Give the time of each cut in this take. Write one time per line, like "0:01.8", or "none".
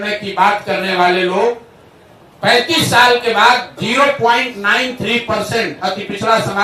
none